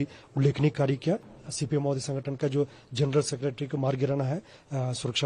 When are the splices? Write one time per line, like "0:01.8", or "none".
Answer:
0:01.3